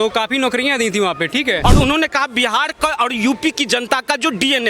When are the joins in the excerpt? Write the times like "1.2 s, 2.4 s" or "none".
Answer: 1.6 s